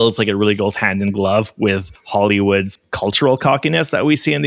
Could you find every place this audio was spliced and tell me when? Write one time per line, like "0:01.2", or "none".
0:02.8